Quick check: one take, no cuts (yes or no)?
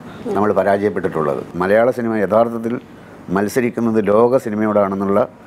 no